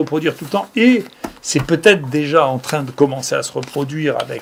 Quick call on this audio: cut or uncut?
uncut